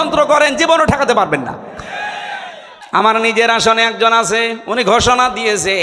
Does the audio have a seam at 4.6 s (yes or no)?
no